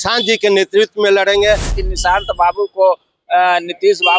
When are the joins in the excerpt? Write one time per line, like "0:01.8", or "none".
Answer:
0:01.8